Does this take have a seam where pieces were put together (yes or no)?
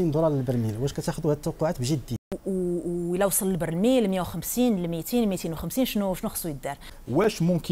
no